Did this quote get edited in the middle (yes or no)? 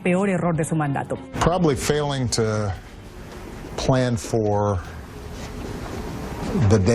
yes